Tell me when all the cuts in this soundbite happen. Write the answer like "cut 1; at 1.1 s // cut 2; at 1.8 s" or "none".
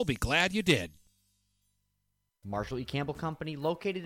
cut 1; at 2.4 s